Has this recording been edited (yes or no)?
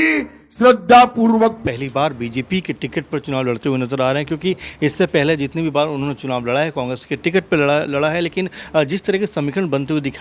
yes